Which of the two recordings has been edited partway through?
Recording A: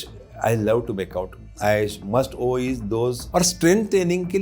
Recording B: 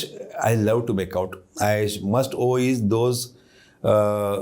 A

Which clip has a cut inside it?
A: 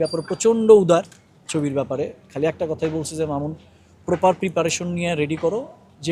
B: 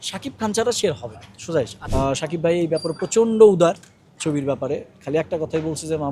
B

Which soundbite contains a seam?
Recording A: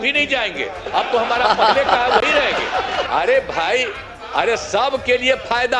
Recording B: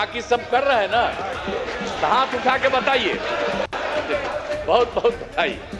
A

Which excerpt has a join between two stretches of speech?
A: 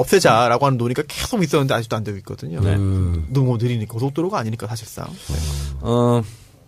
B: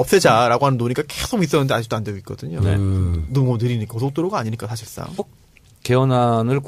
A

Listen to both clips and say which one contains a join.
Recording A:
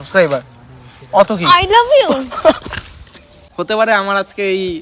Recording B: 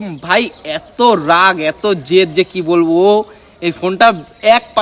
A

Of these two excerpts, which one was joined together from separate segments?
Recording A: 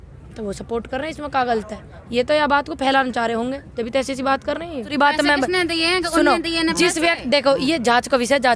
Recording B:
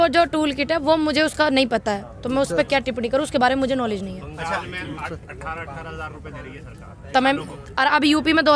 A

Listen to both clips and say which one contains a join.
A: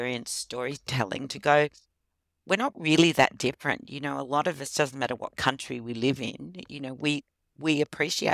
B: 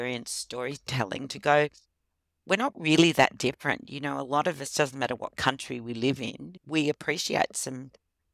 B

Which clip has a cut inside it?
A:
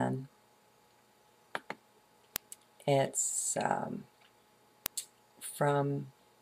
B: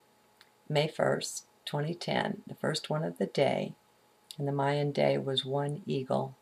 B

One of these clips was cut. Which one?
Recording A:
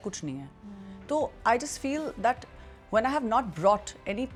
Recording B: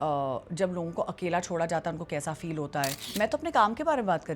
B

